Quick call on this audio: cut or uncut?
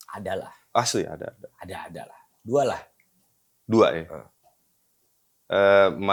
uncut